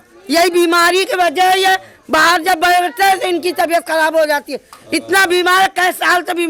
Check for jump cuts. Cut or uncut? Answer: uncut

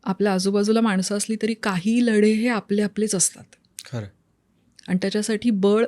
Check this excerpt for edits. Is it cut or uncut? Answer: uncut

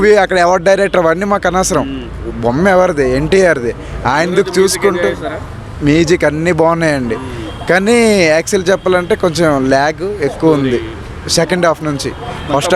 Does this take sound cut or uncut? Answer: uncut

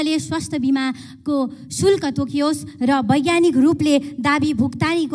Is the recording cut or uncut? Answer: uncut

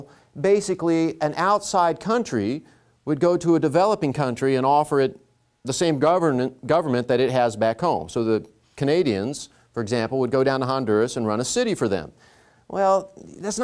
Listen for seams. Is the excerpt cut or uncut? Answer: uncut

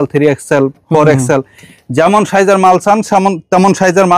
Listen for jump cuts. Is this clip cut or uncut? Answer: uncut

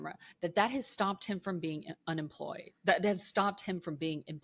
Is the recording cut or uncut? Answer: uncut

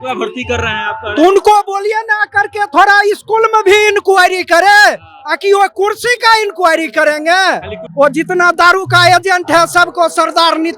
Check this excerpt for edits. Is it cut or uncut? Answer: cut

